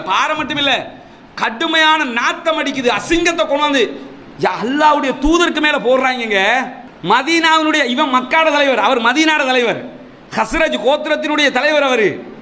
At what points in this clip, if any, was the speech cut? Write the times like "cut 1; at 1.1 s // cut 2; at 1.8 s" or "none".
cut 1; at 6.8 s